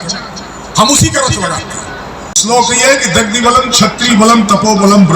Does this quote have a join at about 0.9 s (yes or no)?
no